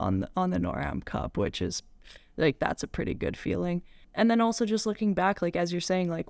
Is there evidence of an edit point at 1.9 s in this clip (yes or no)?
no